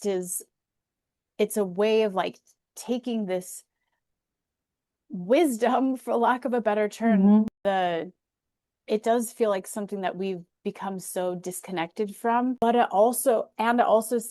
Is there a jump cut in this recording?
yes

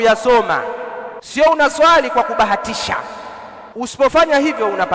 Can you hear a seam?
yes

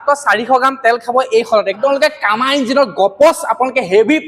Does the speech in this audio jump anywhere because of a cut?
yes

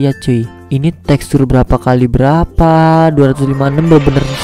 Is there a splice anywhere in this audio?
no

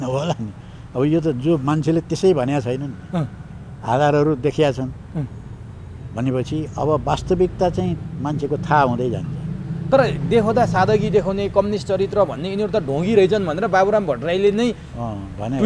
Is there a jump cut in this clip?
no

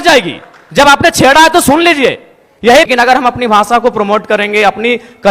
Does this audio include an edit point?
yes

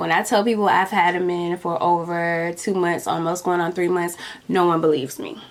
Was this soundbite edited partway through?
no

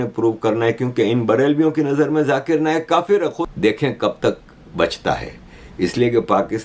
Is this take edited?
yes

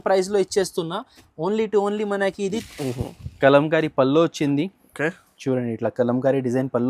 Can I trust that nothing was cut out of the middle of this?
no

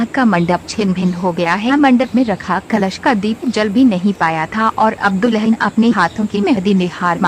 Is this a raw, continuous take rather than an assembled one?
yes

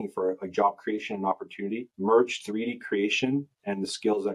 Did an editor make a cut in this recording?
no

